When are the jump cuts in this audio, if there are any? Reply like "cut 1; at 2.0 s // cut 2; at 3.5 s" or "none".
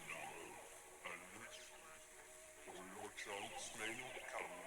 none